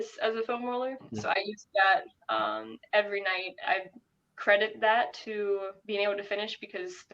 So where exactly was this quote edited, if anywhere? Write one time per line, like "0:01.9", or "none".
0:01.0
0:03.5